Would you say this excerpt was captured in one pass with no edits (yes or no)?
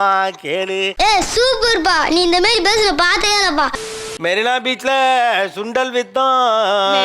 no